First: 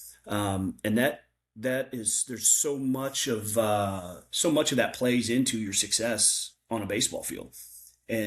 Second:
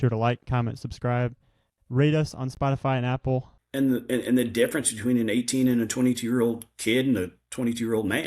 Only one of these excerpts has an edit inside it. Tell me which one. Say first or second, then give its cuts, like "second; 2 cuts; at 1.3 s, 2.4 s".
second; 1 cut; at 3.6 s